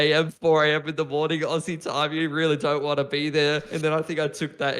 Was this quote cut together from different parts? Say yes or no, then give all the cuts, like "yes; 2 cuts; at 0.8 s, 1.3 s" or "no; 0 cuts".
yes; 1 cut; at 3.7 s